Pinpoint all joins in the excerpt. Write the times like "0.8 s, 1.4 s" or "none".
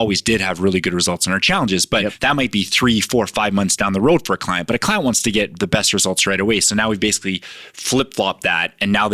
2.2 s